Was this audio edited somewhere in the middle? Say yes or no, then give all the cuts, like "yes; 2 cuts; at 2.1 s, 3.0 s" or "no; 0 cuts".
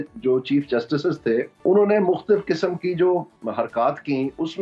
yes; 2 cuts; at 1.5 s, 3.3 s